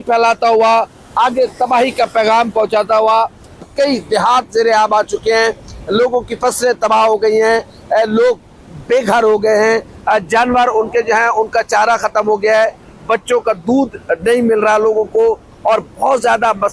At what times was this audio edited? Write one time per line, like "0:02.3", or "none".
0:03.6